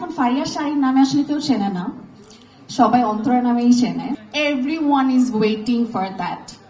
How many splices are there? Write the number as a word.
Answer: one